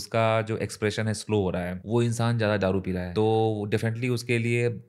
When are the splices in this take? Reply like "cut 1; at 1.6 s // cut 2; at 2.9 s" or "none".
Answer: cut 1; at 1.8 s // cut 2; at 3.1 s